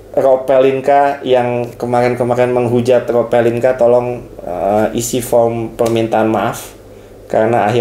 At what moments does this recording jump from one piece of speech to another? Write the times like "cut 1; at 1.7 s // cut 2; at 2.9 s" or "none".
none